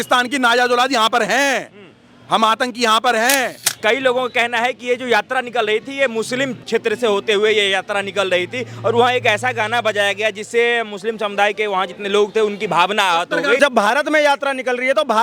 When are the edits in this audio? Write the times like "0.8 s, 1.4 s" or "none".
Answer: 3.7 s, 6.6 s, 13.6 s